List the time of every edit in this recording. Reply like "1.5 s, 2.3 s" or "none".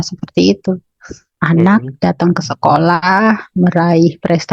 1.3 s